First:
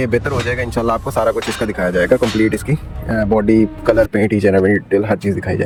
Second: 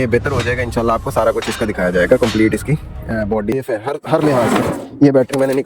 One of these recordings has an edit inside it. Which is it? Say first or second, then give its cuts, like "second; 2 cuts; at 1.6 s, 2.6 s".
second; 1 cut; at 3.5 s